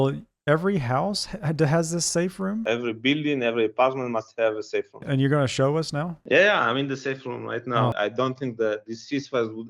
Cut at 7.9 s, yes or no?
yes